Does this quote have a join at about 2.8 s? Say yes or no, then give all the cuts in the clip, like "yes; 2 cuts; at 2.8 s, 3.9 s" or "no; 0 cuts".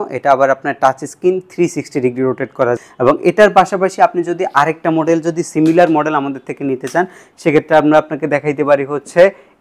yes; 1 cut; at 2.8 s